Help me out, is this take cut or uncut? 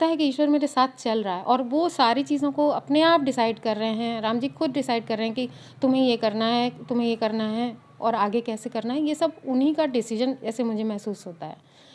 uncut